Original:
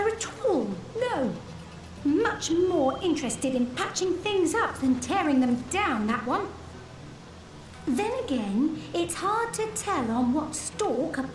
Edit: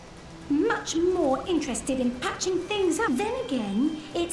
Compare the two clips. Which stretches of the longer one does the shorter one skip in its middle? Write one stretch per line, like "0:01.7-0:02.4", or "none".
0:04.6-0:07.9

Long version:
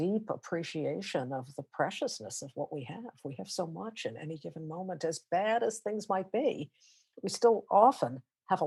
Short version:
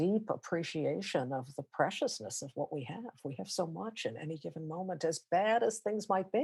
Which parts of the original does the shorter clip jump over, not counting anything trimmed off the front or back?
none

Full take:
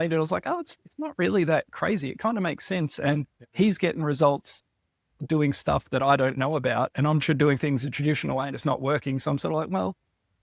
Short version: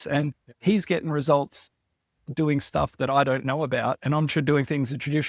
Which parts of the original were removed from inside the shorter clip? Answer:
none

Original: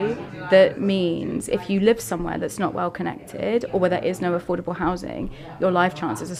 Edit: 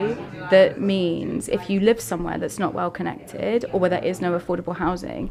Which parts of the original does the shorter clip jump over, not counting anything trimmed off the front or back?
none

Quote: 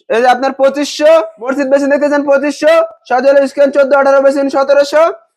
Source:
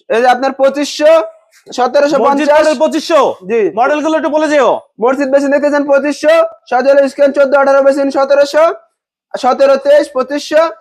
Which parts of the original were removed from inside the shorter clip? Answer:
0:01.4-0:05.0

